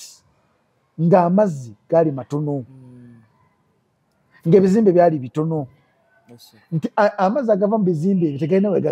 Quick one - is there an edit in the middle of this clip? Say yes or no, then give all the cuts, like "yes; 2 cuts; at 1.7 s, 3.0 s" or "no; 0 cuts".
no; 0 cuts